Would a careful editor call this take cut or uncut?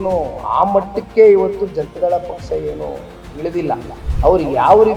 cut